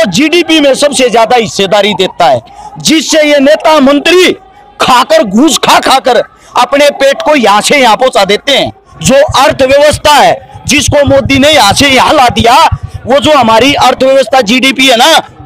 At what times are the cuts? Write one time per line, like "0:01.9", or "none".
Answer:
0:08.9

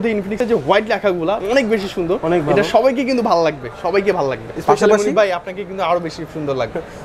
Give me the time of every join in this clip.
0:01.4
0:04.5

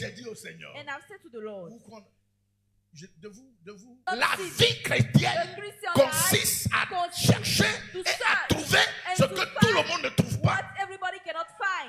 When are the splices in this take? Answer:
0:04.0

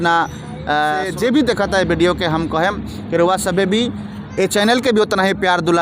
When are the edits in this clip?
0:01.1

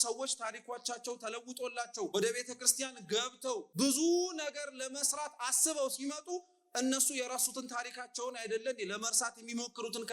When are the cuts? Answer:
0:02.1
0:03.7

